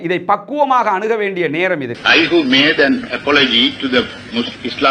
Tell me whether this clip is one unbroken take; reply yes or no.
no